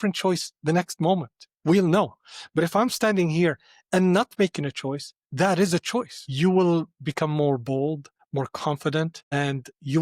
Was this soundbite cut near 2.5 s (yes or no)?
no